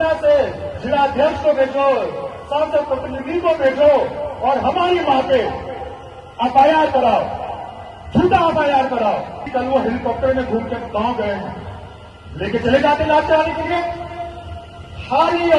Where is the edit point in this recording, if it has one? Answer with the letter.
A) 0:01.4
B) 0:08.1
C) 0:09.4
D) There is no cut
C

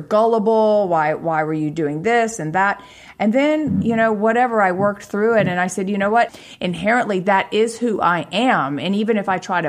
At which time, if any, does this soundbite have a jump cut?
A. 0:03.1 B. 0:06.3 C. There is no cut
B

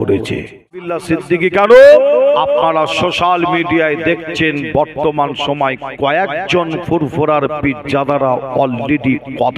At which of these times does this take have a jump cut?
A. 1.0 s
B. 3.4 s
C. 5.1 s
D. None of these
A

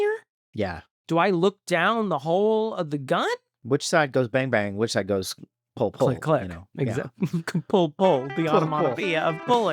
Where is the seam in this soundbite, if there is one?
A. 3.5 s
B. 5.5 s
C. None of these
A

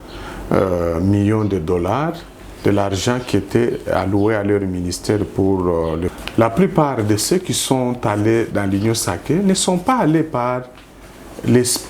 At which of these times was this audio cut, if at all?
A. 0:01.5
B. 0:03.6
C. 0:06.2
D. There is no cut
C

